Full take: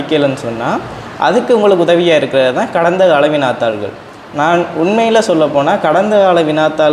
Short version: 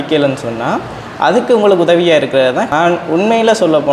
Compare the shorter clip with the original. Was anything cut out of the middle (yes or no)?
yes